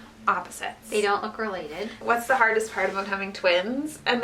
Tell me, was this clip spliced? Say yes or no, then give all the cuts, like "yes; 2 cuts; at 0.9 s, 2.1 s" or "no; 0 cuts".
yes; 1 cut; at 2.0 s